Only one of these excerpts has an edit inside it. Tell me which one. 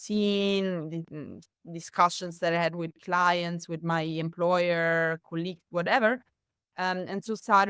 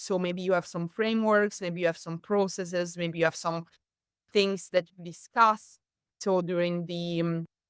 second; 1 cut; at 6.2 s

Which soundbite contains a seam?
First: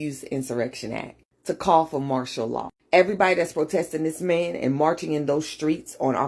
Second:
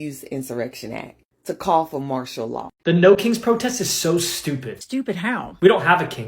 second; 1 cut; at 2.7 s

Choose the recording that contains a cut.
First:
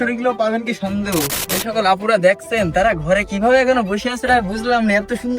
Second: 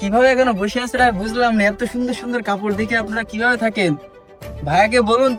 first; 1 cut; at 1.4 s

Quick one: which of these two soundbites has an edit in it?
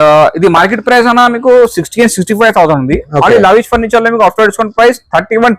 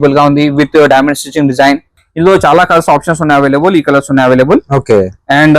second; 1 cut; at 2.0 s

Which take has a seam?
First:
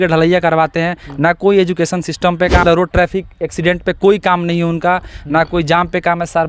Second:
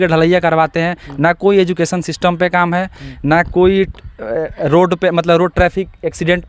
first; 1 cut; at 2.6 s

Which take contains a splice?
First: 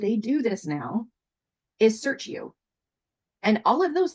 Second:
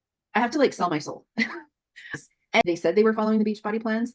second; 1 cut; at 2.6 s

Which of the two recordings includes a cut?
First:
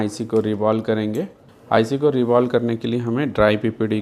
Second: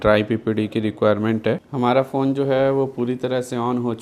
second; 1 cut; at 1.7 s

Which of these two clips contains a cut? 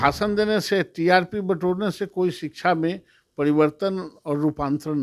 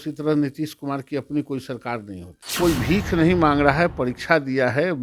second; 1 cut; at 2.5 s

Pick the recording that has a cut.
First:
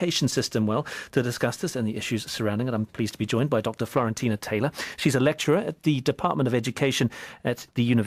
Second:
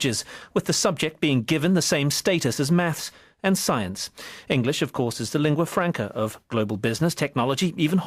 first; 1 cut; at 1.1 s

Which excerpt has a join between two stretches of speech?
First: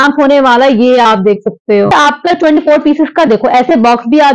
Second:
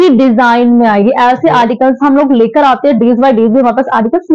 first; 1 cut; at 1.9 s

